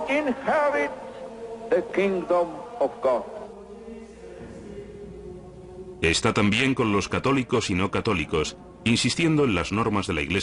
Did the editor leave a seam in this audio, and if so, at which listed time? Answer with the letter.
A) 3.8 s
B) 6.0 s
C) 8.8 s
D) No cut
A